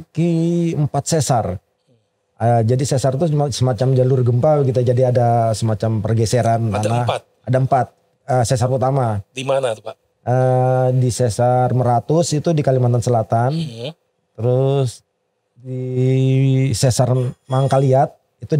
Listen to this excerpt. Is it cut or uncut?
uncut